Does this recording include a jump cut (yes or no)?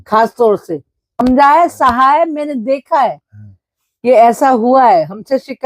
yes